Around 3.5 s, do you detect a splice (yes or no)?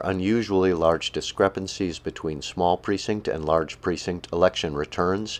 no